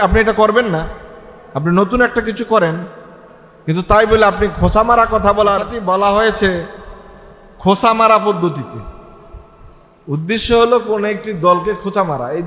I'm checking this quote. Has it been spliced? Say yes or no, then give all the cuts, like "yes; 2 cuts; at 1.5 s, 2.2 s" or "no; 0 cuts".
yes; 1 cut; at 5.7 s